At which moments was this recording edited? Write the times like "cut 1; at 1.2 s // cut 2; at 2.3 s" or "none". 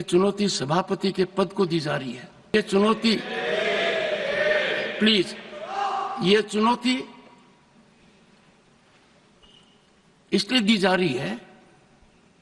cut 1; at 2.5 s